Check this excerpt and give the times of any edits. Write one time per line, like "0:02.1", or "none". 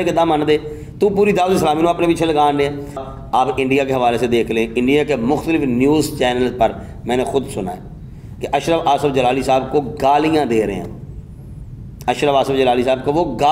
0:03.1